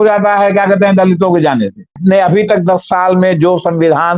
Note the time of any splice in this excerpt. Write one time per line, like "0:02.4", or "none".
0:02.0